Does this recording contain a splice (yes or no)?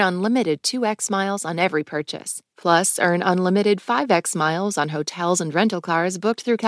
no